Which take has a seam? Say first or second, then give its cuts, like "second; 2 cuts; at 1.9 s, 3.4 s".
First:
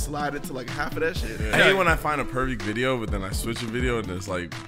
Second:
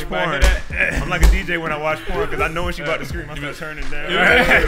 first; 1 cut; at 1.5 s